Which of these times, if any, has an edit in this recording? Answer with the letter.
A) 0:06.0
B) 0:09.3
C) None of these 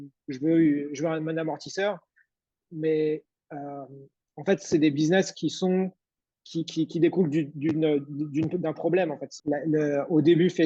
B